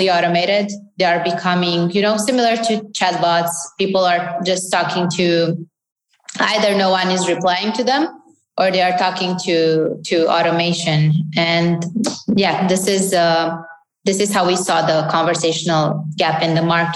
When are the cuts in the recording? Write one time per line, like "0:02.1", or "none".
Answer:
none